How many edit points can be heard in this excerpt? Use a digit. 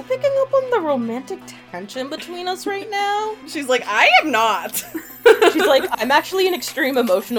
1